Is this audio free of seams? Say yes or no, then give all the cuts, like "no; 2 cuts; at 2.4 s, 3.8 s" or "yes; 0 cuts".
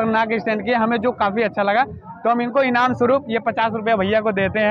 yes; 0 cuts